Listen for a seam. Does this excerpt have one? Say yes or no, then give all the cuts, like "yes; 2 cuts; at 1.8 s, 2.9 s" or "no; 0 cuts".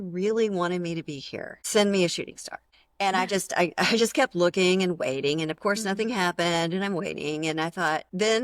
no; 0 cuts